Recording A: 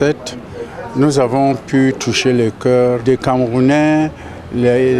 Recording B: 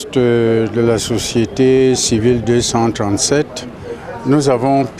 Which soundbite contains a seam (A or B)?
A